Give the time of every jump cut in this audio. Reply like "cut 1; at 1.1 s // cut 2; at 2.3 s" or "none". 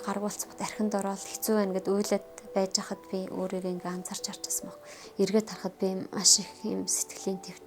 cut 1; at 5.0 s